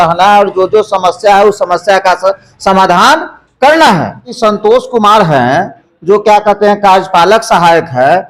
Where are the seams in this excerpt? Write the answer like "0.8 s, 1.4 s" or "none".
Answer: 4.3 s